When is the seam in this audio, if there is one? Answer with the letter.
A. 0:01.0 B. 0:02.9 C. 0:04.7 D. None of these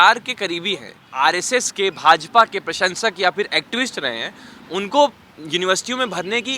A